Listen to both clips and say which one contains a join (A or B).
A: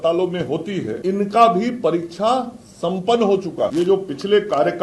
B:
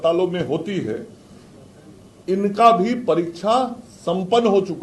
A